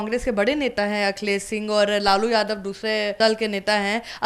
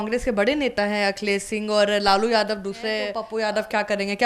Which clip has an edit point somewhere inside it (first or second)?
second